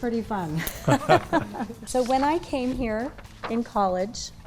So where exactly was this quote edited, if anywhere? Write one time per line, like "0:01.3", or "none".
0:01.8